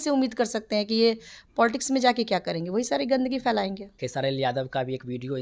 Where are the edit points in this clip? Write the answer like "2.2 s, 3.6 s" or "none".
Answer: 3.9 s